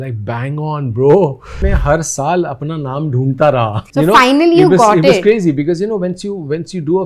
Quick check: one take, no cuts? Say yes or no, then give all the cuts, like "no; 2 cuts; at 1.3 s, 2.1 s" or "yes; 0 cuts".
no; 2 cuts; at 1.6 s, 3.8 s